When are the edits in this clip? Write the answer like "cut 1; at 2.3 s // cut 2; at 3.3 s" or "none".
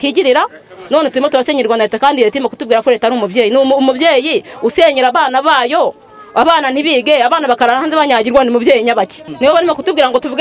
cut 1; at 9.2 s